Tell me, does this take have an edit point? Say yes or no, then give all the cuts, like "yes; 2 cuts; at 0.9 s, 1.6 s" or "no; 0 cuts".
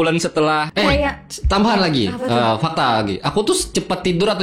yes; 1 cut; at 1.0 s